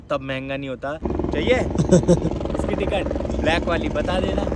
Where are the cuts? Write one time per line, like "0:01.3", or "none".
0:01.0